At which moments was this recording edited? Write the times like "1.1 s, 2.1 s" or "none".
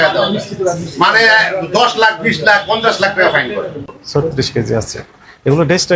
3.7 s